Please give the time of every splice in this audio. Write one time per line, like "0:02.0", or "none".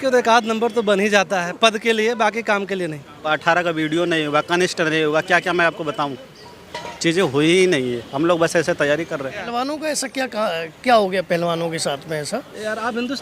0:03.2
0:09.4